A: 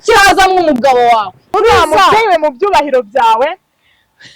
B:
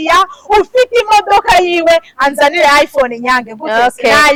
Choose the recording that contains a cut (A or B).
A